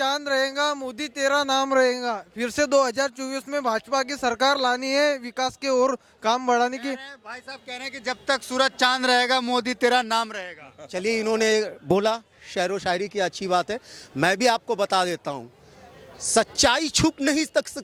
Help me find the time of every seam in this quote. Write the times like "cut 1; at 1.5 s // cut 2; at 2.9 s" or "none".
none